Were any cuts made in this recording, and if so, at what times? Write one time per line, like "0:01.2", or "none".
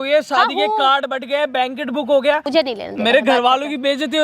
0:02.4